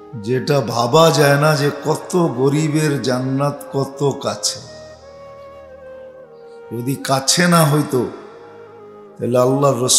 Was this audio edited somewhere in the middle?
yes; 2 cuts; at 5.1 s, 6.7 s

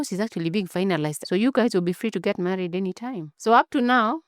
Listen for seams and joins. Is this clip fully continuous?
no; 1 cut; at 1.2 s

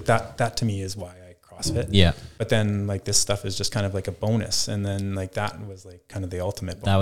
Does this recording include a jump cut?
yes; 1 cut; at 2.3 s

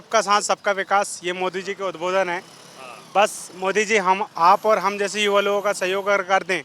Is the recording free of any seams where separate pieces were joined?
yes; 0 cuts

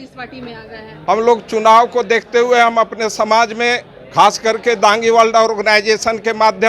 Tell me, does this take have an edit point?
yes; 1 cut; at 1.0 s

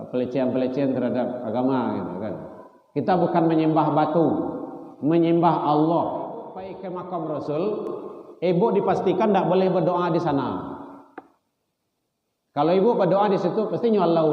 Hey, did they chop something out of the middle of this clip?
yes; 1 cut; at 6.8 s

